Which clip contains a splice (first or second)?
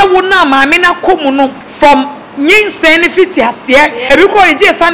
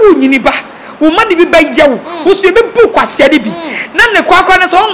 first